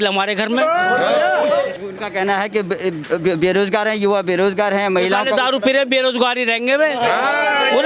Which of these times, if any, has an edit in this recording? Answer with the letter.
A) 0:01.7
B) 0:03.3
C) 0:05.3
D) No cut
A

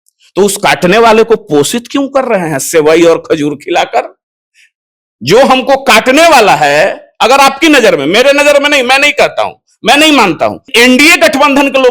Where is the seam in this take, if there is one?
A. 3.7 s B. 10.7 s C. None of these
B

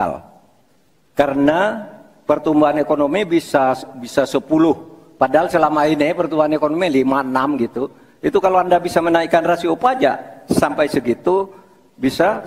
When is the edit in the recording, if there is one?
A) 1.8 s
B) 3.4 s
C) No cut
C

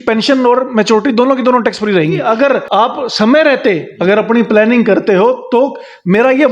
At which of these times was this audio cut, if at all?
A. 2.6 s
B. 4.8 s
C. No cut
A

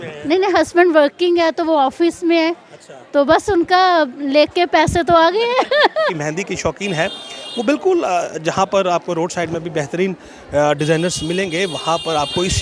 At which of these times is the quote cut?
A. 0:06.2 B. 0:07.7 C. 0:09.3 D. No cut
A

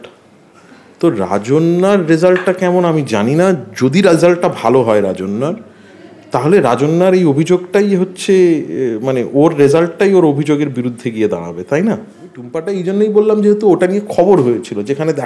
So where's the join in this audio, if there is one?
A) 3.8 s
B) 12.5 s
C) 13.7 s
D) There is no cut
B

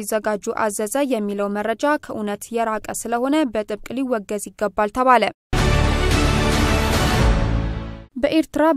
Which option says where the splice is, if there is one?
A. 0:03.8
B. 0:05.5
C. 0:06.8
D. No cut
B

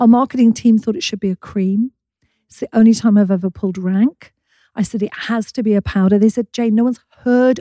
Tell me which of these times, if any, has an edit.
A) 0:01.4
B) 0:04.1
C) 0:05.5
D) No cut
D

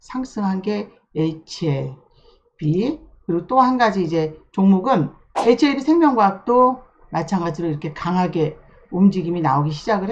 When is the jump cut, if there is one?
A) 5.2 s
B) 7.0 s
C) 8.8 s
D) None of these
A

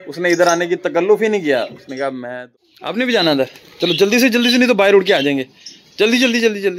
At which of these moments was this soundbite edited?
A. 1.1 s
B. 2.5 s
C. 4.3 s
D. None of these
B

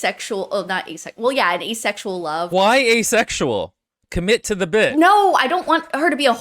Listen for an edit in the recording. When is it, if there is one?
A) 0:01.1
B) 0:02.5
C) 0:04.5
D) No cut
B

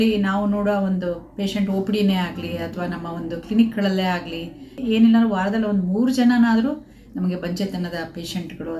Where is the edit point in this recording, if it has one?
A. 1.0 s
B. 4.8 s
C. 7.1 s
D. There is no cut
B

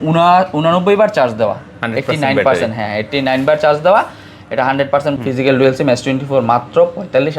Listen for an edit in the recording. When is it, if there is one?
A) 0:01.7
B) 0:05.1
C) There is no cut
B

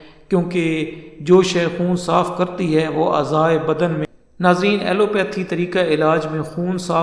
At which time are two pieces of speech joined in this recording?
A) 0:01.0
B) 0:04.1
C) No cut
B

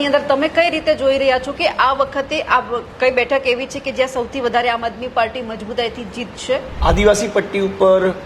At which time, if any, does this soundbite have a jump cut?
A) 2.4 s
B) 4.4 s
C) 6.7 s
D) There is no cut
C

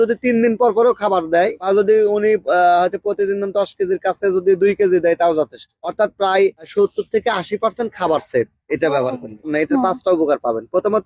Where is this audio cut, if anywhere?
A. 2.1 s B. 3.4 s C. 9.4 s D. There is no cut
C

